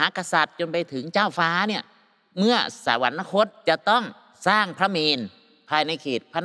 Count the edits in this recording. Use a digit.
2